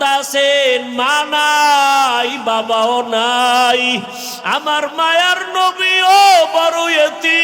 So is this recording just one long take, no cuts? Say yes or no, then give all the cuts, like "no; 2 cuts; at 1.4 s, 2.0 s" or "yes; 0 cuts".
yes; 0 cuts